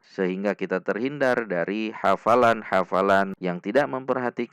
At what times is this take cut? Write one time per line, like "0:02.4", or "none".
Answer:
0:03.3